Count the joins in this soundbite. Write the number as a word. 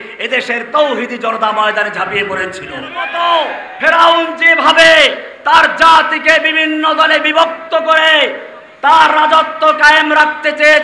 one